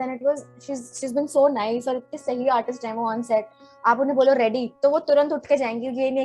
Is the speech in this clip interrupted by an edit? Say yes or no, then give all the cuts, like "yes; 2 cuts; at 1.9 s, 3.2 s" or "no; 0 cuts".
yes; 1 cut; at 4.7 s